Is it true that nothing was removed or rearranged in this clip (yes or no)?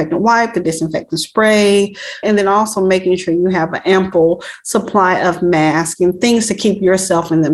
yes